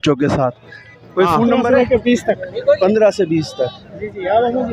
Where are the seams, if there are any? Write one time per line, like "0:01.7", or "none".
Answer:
0:01.6